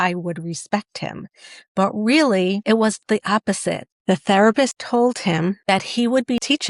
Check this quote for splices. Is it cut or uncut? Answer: cut